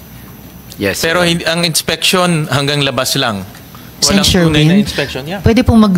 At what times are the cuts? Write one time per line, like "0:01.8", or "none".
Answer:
none